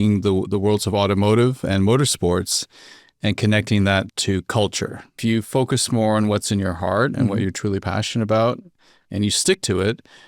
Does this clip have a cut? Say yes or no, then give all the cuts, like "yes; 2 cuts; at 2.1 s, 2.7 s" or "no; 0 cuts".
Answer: yes; 1 cut; at 5.2 s